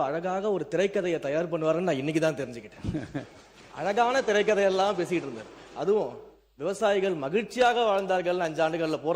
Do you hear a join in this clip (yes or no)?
no